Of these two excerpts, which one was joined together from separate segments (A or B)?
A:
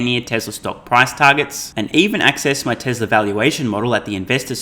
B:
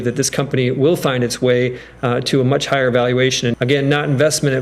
B